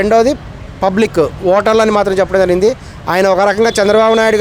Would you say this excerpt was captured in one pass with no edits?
yes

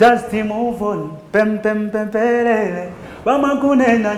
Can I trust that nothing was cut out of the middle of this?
yes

